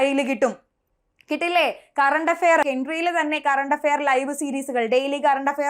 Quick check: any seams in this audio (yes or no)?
yes